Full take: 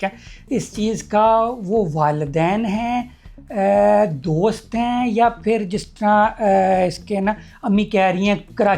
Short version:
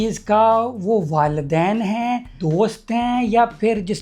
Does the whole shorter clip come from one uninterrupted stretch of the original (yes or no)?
no